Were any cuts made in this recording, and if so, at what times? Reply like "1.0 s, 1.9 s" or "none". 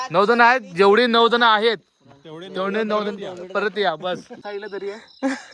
4.4 s